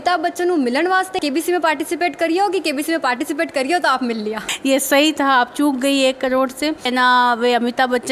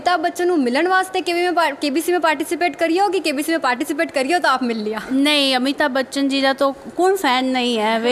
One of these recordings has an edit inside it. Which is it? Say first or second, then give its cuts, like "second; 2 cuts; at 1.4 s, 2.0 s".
first; 3 cuts; at 1.2 s, 4.4 s, 6.9 s